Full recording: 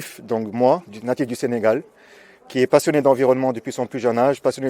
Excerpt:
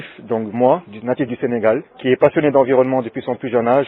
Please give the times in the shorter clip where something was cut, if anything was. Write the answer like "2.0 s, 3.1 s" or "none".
1.9 s